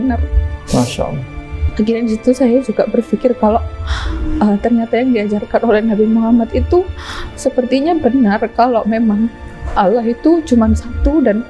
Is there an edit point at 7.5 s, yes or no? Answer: no